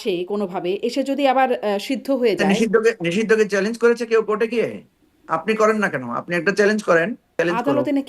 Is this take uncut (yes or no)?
no